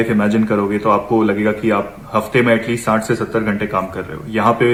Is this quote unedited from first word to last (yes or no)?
yes